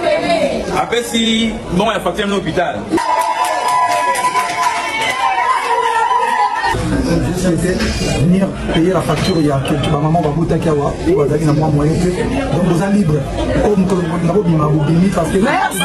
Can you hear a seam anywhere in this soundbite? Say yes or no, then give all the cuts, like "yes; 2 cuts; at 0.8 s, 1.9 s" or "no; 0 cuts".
no; 0 cuts